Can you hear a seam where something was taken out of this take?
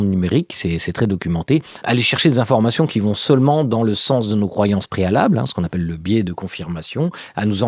yes; 1 cut; at 1.7 s

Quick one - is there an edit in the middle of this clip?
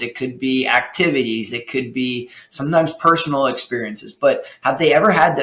no; 0 cuts

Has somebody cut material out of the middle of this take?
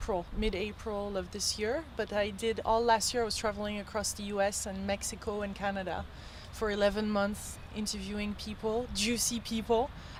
no; 0 cuts

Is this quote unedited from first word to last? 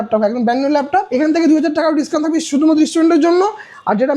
no; 1 cut; at 1.1 s

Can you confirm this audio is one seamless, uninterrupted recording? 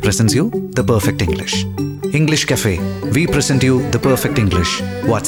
yes; 0 cuts

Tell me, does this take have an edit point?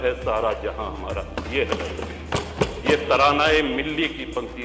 no; 0 cuts

